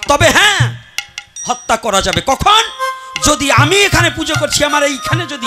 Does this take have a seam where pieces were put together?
no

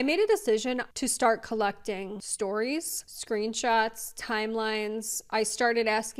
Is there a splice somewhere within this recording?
yes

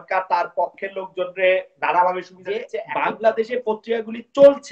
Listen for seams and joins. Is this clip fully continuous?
no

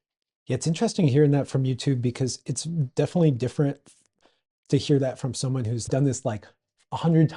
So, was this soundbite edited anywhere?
yes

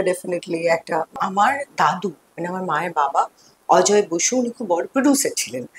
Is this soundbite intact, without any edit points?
no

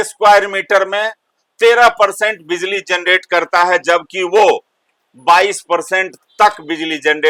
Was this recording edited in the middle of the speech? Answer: no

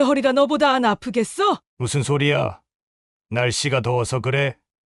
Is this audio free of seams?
no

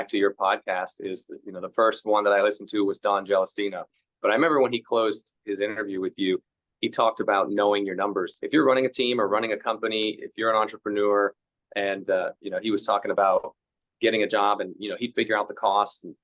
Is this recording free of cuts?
no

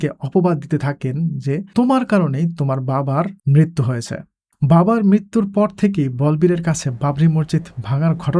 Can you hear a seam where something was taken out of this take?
yes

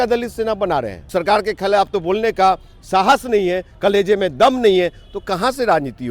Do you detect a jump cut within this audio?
yes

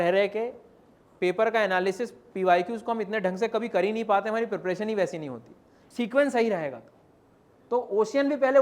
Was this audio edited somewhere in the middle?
yes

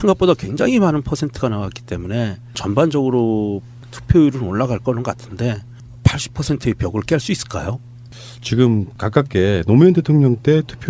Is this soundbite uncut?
yes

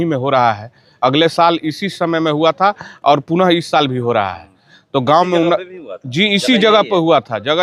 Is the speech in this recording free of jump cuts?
yes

